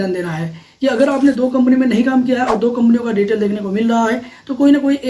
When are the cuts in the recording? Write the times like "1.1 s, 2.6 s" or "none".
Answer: none